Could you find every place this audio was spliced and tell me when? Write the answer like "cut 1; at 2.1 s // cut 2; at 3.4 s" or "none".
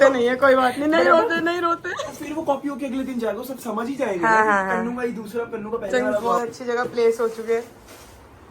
cut 1; at 1.8 s // cut 2; at 6.7 s